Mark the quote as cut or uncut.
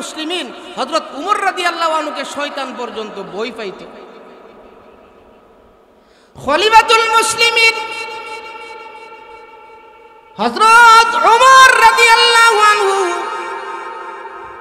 uncut